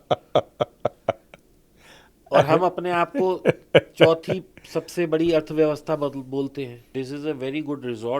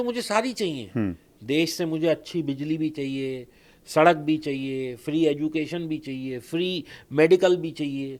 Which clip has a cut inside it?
first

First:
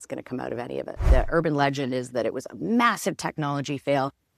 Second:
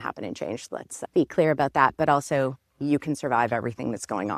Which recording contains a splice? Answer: first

